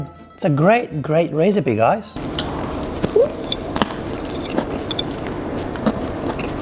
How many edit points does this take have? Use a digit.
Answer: 1